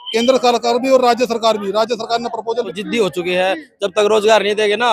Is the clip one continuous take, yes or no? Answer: no